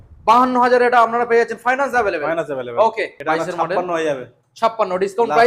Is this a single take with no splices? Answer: no; 1 cut; at 3.1 s

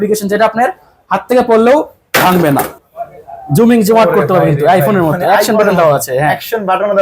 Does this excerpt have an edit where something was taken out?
yes; 1 cut; at 2.8 s

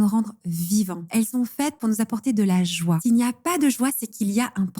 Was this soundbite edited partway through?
yes; 2 cuts; at 1.0 s, 3.0 s

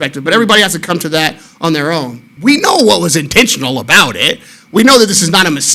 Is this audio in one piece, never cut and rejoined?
no; 1 cut; at 2.2 s

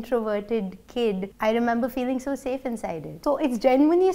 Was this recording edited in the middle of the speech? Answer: yes; 2 cuts; at 1.3 s, 3.1 s

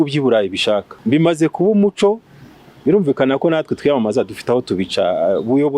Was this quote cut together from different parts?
yes; 1 cut; at 0.9 s

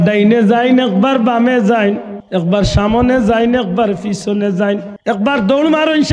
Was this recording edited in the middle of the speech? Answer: yes; 2 cuts; at 2.1 s, 4.9 s

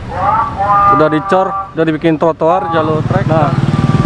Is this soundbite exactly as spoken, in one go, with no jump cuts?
no; 1 cut; at 3.1 s

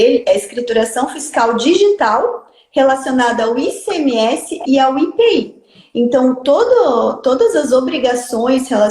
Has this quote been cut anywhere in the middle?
no; 0 cuts

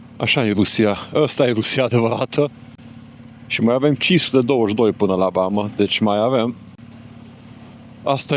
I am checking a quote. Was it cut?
no; 0 cuts

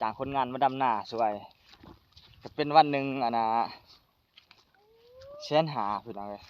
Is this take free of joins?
yes; 0 cuts

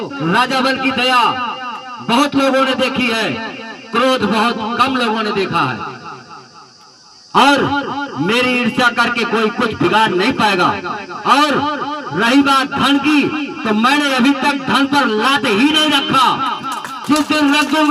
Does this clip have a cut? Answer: no; 0 cuts

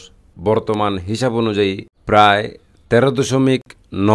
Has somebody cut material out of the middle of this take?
yes; 1 cut; at 1.9 s

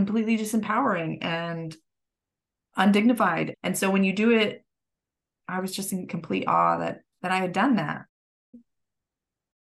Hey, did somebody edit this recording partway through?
yes; 1 cut; at 7.1 s

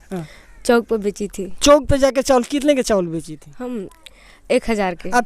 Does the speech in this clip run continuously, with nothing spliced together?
yes; 0 cuts

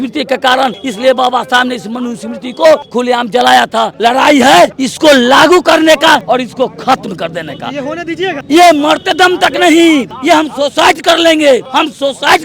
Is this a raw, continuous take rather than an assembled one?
no; 8 cuts; at 0.9 s, 2.9 s, 3.9 s, 4.8 s, 6.2 s, 8.4 s, 10.1 s, 11.7 s

